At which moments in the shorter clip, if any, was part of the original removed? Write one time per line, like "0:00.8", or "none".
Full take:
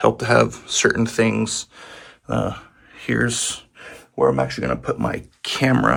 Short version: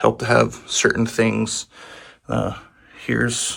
none